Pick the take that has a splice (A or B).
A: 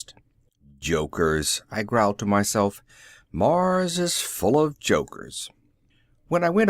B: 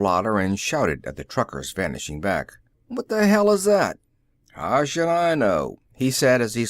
B